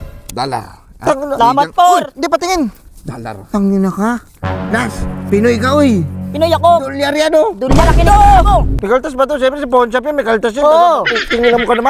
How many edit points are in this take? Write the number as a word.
one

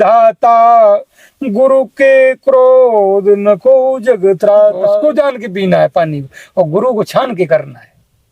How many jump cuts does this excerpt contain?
one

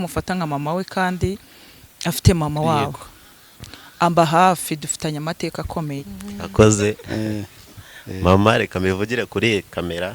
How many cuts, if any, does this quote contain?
one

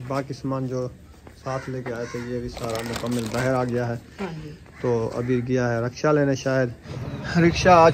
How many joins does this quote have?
one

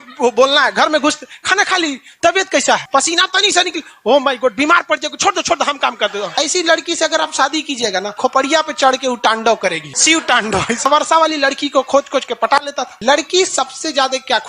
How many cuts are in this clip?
six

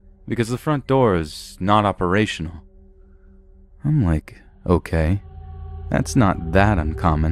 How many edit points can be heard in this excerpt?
one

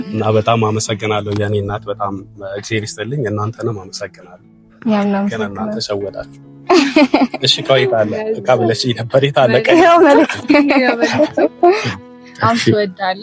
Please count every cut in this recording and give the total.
zero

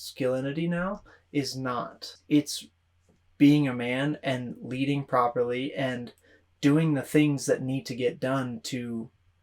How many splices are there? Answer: one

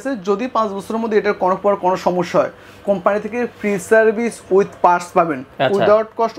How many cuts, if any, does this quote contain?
zero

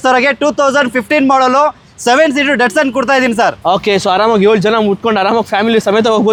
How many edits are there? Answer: zero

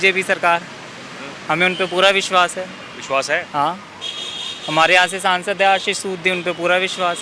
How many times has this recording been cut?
zero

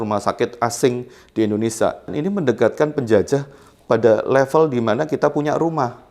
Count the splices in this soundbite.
one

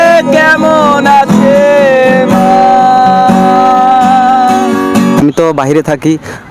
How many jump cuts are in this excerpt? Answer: one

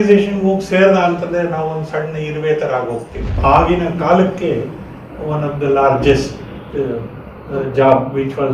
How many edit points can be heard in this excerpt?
one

